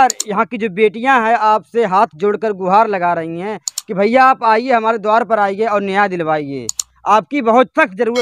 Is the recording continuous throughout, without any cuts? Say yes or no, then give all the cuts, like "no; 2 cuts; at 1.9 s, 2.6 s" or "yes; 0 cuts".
yes; 0 cuts